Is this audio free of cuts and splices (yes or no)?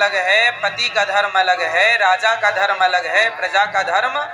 yes